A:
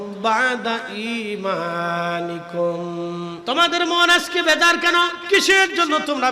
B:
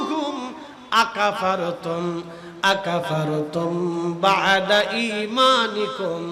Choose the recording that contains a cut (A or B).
A